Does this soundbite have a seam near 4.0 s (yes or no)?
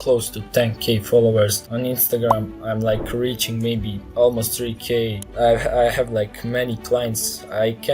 yes